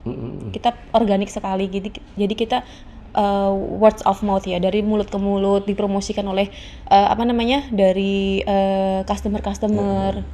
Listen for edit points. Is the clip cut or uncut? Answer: uncut